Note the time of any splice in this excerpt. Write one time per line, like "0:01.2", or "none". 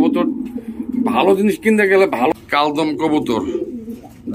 0:02.3

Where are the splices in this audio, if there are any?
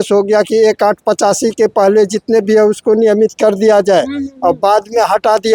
none

